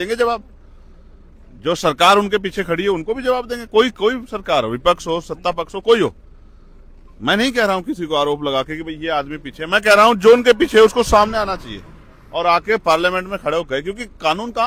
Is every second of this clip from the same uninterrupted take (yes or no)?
yes